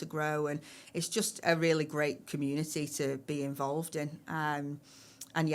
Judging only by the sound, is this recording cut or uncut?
uncut